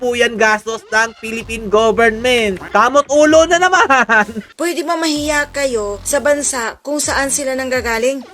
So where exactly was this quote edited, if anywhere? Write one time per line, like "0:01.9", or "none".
0:02.6
0:04.4